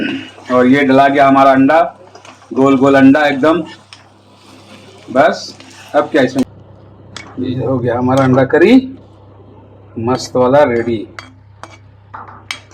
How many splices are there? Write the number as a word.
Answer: one